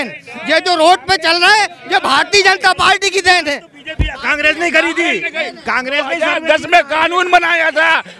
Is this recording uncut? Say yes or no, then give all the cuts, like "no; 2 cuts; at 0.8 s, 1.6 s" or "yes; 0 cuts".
yes; 0 cuts